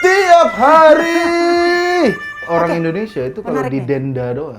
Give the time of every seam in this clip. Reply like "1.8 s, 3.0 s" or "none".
2.4 s